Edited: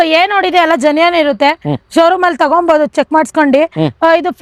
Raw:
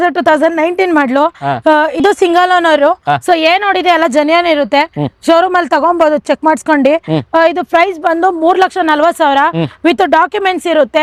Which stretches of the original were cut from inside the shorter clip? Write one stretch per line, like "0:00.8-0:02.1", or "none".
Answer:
none